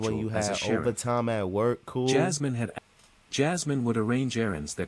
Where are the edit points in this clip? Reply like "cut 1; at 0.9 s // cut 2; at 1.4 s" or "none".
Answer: cut 1; at 2.7 s